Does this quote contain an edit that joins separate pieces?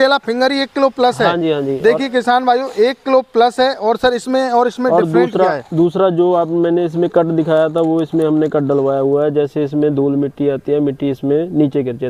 no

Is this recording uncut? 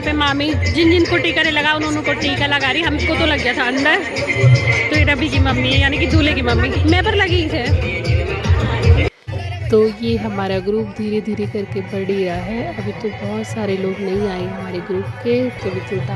yes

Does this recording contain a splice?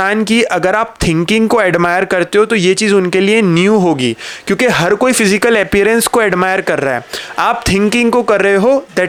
no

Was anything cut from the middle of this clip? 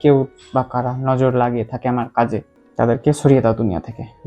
yes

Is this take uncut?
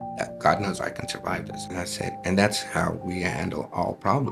no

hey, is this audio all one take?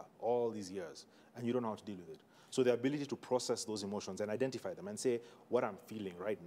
yes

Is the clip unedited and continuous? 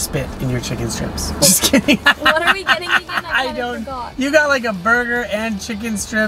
yes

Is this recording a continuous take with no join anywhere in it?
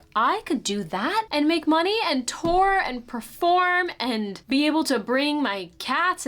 no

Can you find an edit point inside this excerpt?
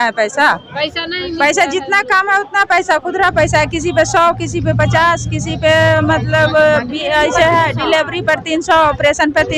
no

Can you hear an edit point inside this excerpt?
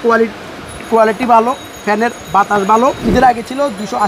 yes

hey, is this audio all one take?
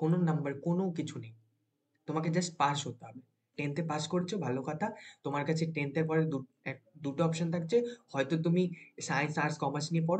yes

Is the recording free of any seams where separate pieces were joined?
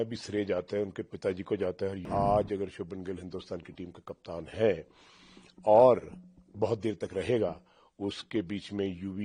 no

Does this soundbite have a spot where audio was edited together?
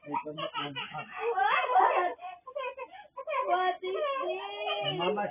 yes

